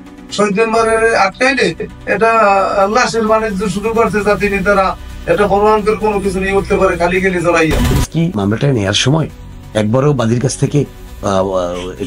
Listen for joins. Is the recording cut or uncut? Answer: cut